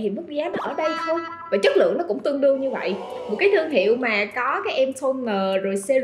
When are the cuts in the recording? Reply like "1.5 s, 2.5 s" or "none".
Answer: 3.1 s